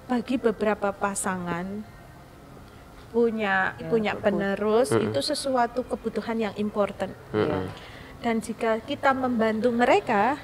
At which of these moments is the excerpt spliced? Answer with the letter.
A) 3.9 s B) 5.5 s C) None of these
A